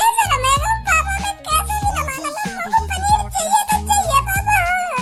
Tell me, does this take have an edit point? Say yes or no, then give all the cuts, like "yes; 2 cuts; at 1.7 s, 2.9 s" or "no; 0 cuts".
no; 0 cuts